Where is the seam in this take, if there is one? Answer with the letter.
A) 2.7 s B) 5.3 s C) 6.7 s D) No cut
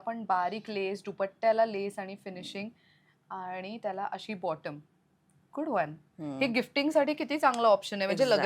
D